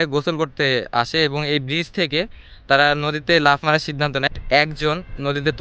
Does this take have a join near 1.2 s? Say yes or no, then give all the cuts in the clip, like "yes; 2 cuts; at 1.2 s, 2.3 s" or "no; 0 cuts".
no; 1 cut; at 4.2 s